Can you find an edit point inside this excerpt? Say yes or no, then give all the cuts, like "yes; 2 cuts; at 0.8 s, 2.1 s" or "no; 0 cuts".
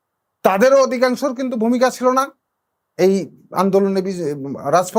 no; 0 cuts